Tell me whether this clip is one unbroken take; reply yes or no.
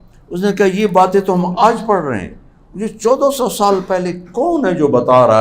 yes